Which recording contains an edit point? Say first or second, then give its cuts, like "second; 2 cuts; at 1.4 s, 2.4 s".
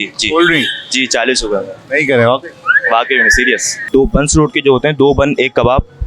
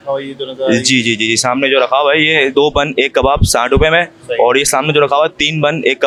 first; 1 cut; at 3.9 s